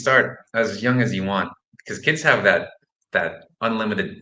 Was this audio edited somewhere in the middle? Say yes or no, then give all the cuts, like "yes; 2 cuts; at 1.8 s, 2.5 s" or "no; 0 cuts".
no; 0 cuts